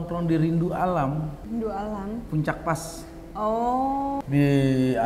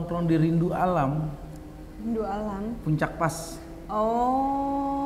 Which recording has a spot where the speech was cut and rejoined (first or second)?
first